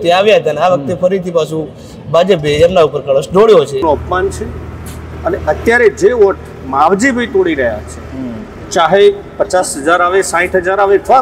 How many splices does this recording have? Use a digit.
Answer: 1